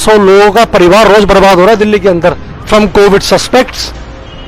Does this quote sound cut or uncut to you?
cut